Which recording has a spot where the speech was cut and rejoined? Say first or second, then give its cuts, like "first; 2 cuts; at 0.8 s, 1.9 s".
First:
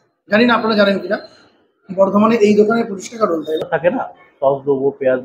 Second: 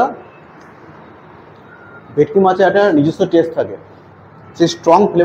first; 1 cut; at 3.6 s